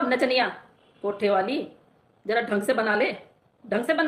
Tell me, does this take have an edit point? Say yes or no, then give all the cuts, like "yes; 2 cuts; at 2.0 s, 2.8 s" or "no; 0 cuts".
no; 0 cuts